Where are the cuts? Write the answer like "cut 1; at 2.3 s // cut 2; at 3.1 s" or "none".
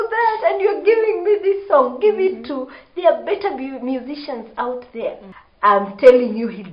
cut 1; at 5.3 s

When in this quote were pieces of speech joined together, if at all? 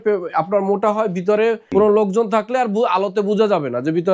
cut 1; at 1.6 s

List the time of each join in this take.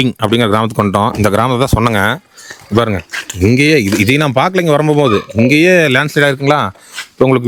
none

